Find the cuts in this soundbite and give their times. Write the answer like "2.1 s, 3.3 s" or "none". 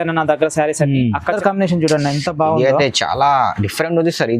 1.4 s